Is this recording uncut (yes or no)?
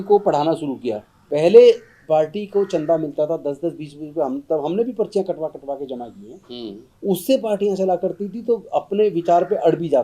no